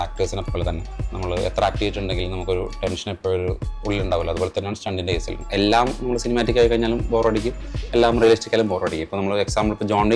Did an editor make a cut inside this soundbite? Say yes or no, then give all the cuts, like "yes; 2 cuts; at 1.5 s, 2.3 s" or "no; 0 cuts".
yes; 1 cut; at 5.4 s